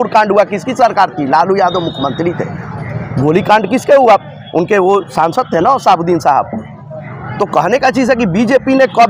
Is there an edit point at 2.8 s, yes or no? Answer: no